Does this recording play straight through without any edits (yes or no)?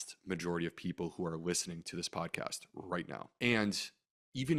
yes